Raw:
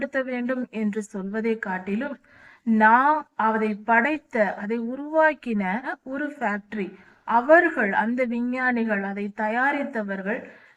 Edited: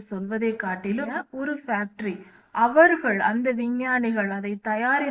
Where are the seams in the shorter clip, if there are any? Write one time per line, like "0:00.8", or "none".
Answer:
0:01.2